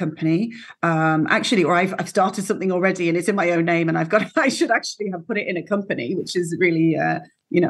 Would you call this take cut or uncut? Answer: uncut